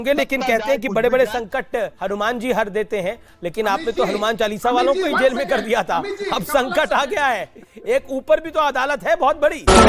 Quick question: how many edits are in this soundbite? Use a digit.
1